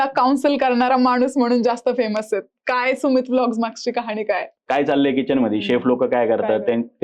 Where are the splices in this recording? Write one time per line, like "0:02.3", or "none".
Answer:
0:04.5